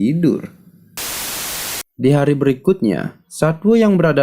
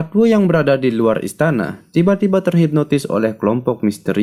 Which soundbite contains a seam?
first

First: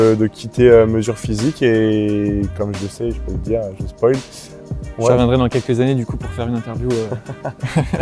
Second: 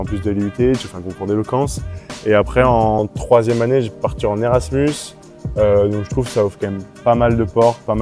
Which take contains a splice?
first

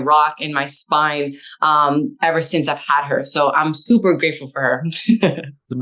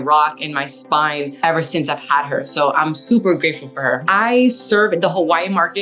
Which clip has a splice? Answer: second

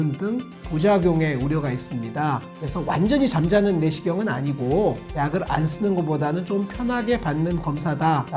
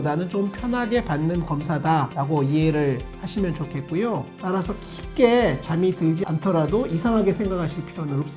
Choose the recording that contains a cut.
first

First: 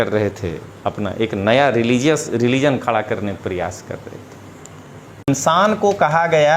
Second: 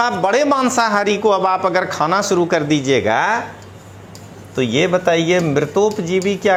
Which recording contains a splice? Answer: first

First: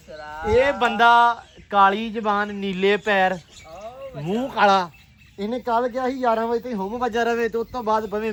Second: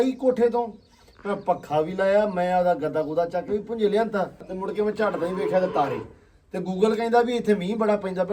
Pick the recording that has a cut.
second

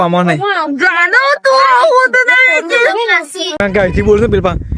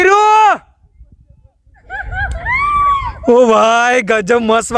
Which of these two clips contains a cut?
first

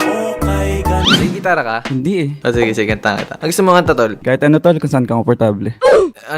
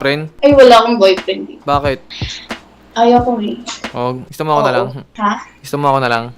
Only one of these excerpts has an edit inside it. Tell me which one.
first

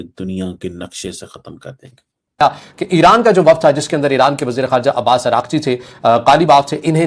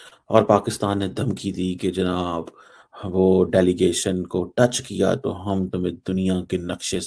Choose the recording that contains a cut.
first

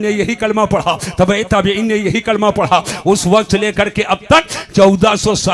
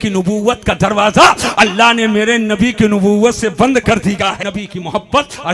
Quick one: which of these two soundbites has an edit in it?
second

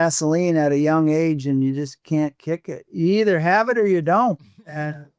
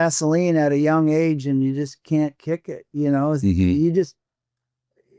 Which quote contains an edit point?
first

